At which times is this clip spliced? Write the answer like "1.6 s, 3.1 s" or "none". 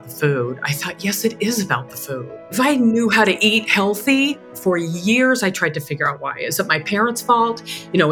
2.5 s, 4.5 s